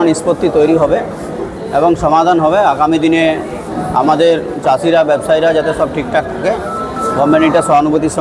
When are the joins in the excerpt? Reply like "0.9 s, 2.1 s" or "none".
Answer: none